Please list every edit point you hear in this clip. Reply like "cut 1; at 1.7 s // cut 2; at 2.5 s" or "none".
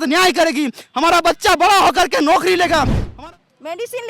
cut 1; at 3.0 s